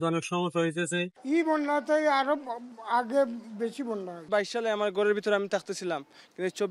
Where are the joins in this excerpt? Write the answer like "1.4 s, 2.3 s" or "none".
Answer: none